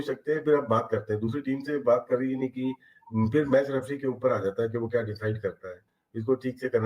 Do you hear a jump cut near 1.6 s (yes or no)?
no